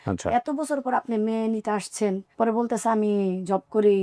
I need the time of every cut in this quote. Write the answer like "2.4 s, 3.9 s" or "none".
2.3 s